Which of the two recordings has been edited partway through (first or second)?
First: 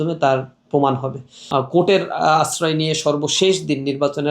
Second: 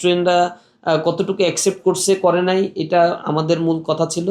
first